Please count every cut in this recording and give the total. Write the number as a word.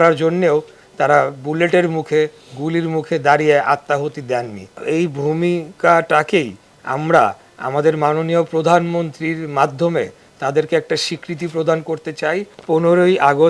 two